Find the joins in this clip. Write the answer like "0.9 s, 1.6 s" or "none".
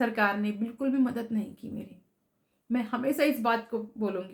none